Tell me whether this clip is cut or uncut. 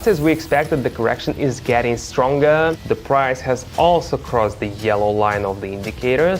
cut